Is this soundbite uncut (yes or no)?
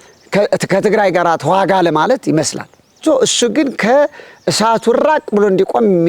no